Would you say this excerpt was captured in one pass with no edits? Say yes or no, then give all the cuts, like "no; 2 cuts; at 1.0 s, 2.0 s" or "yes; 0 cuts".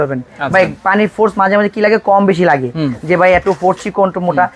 yes; 0 cuts